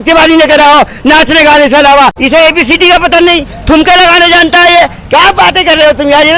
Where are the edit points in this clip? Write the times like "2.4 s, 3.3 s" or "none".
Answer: 2.2 s